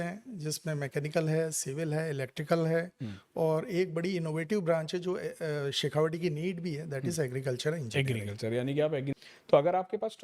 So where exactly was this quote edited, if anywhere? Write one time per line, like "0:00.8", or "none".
0:09.1